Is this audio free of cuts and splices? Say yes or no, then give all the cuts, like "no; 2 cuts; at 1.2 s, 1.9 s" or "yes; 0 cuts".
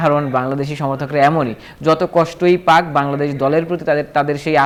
yes; 0 cuts